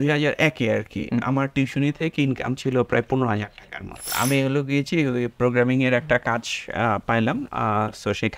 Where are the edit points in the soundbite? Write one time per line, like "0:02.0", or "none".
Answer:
0:04.0